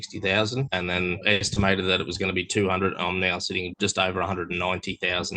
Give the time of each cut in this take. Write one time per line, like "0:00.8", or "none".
0:01.1
0:03.7